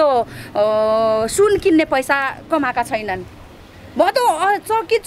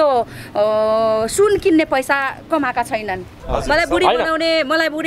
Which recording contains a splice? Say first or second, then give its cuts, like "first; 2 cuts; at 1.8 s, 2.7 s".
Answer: second; 1 cut; at 3.4 s